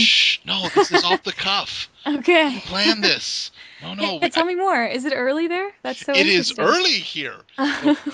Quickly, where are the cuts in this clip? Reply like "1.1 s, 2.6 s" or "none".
7.0 s